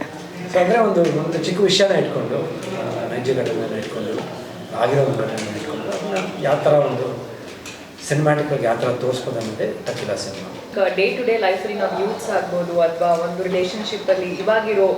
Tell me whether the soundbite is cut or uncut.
cut